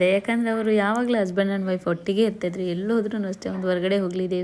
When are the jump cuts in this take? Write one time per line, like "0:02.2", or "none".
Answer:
none